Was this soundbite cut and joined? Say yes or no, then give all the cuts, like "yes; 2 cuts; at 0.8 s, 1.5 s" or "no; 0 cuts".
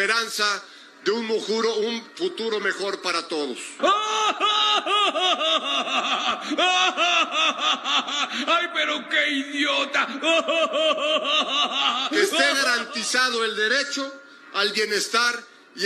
no; 0 cuts